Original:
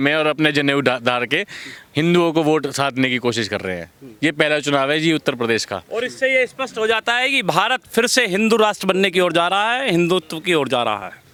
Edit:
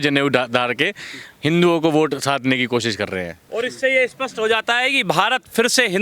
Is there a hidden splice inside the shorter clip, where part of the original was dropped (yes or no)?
yes